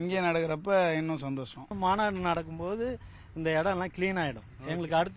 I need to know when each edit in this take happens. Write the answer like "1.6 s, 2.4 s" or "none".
1.7 s